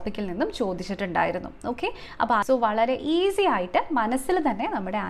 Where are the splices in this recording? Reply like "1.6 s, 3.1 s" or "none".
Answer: 2.4 s